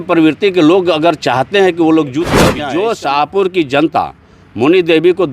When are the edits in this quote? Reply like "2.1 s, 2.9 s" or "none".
2.4 s